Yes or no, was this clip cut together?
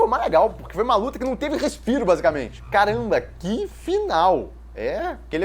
yes